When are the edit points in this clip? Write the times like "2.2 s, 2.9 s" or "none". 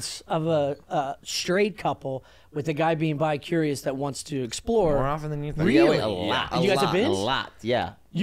none